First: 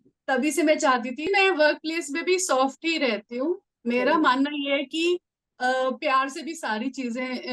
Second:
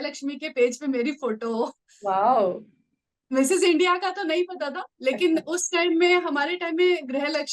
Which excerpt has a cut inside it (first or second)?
first